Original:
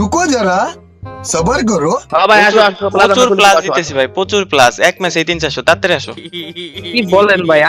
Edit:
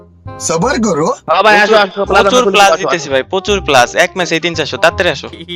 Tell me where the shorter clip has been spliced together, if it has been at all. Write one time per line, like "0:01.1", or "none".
none